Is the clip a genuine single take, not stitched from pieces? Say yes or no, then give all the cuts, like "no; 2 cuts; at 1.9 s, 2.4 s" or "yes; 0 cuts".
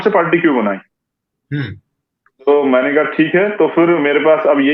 yes; 0 cuts